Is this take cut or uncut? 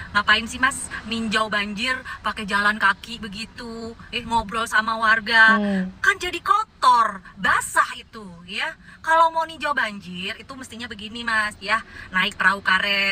uncut